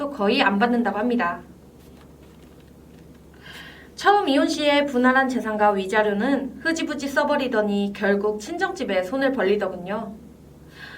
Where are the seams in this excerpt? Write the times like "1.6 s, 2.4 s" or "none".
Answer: none